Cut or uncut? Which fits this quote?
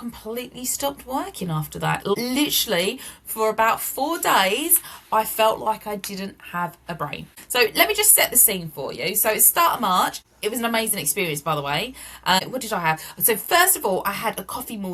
uncut